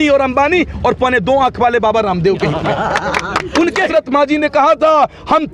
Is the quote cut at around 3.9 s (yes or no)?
yes